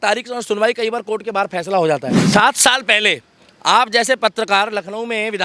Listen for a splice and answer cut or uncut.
cut